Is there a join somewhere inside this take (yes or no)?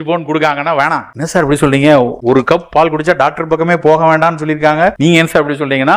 yes